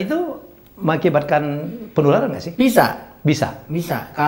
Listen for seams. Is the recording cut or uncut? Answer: uncut